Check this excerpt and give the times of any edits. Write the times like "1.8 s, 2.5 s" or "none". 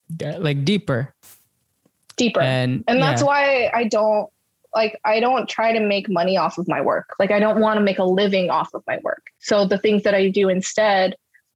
7.1 s